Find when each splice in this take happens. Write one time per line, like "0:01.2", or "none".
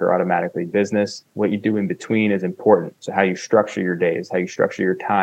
none